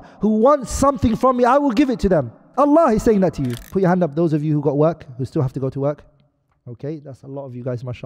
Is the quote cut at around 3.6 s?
yes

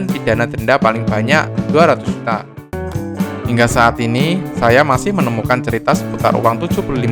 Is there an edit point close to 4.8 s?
no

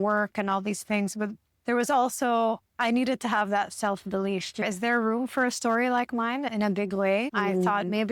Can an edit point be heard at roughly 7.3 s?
yes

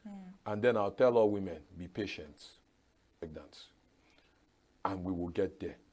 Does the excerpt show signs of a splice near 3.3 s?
yes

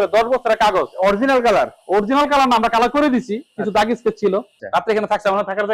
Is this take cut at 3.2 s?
no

